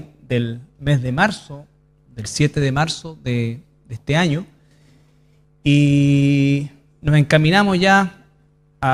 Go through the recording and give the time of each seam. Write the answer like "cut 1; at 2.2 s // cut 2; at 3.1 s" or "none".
none